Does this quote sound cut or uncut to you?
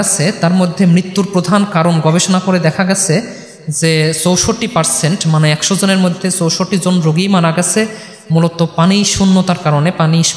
uncut